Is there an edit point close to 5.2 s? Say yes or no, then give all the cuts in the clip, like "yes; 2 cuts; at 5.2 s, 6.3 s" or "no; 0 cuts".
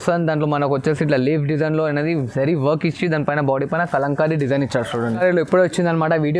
yes; 1 cut; at 5.2 s